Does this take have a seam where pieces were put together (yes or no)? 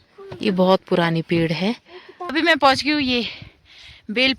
yes